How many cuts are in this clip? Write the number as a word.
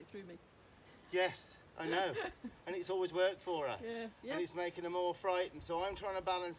zero